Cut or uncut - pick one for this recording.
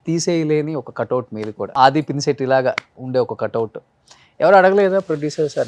cut